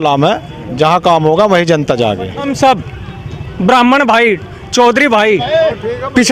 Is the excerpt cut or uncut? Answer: cut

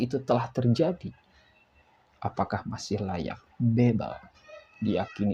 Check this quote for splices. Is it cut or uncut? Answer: uncut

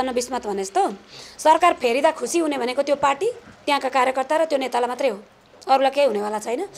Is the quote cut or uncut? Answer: uncut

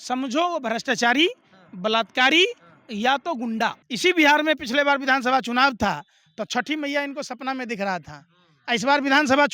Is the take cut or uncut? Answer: cut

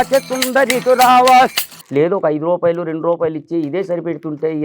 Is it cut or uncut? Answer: cut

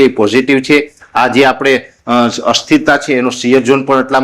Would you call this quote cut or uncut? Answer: uncut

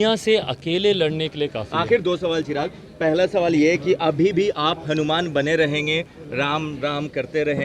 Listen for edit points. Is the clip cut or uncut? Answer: uncut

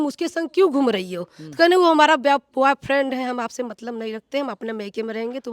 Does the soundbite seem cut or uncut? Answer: uncut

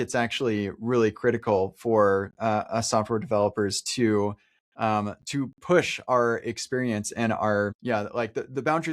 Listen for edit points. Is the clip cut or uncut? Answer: cut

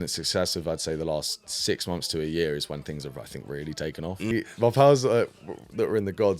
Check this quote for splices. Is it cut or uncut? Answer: cut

